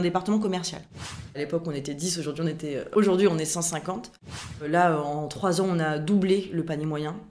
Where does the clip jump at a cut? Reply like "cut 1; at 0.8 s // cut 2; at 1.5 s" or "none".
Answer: cut 1; at 1.3 s // cut 2; at 2.9 s // cut 3; at 4.6 s